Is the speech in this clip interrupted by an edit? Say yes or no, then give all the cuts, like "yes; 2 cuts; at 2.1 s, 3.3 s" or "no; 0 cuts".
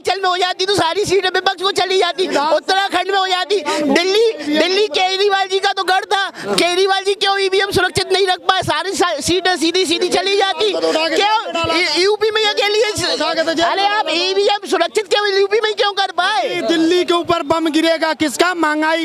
no; 0 cuts